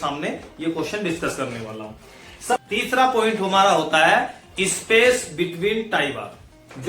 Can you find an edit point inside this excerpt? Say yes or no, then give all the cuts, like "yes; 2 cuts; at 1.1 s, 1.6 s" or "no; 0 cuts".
yes; 1 cut; at 2.6 s